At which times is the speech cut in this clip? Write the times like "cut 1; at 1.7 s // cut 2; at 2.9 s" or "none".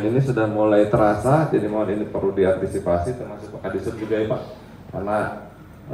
none